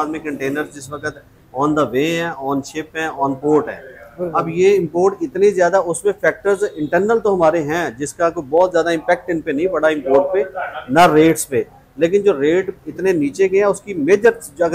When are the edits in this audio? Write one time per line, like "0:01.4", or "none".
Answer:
none